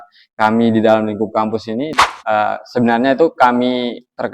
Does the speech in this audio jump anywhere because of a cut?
yes; 1 cut; at 2.1 s

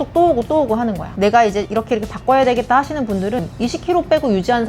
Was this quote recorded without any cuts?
no; 2 cuts; at 1.1 s, 3.4 s

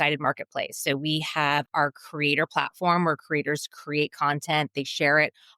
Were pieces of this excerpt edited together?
yes; 1 cut; at 1.7 s

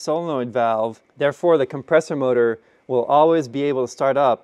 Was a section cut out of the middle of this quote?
yes; 1 cut; at 1.0 s

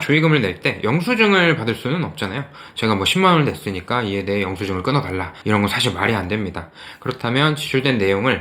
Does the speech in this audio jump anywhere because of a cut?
yes; 1 cut; at 5.3 s

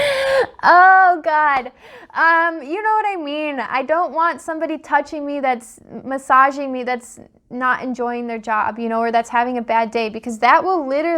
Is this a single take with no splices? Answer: yes; 0 cuts

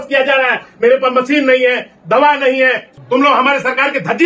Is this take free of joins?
no; 1 cut; at 2.9 s

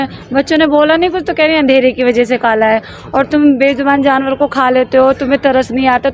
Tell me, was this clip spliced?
no; 0 cuts

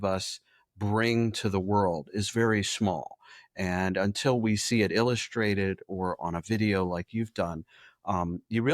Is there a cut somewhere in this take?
no; 0 cuts

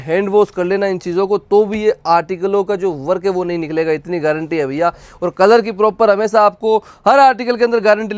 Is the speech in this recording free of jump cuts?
yes; 0 cuts

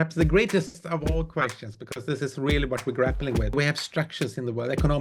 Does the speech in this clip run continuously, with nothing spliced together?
no; 1 cut; at 3.5 s

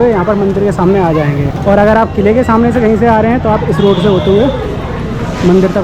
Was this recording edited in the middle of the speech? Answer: no; 0 cuts

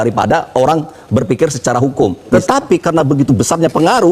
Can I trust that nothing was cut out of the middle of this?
no; 1 cut; at 2.3 s

